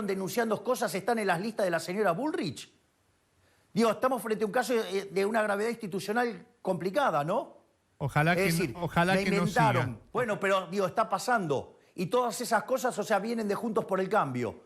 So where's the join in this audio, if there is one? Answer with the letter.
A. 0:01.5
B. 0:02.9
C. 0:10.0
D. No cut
C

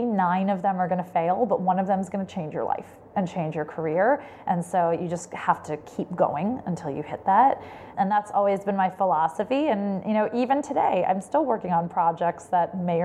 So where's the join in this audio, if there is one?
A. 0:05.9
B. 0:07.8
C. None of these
B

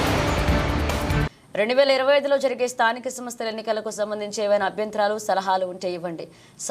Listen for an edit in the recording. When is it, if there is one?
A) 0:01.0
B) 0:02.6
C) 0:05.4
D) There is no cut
A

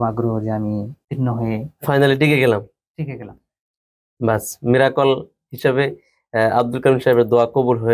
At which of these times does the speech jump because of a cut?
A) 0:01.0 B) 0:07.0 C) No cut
A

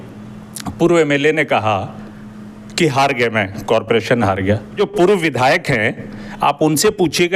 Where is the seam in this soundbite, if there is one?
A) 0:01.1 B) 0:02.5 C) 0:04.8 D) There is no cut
C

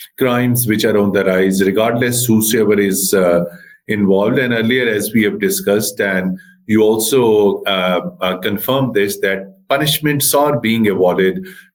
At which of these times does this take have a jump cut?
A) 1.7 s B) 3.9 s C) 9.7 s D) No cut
D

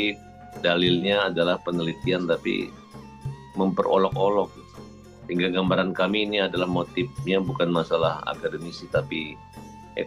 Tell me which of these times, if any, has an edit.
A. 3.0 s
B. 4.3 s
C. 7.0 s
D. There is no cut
D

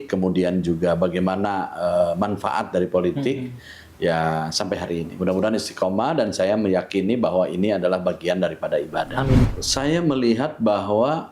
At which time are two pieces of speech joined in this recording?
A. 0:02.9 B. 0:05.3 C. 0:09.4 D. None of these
C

